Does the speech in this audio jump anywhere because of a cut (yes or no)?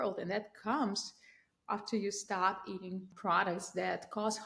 yes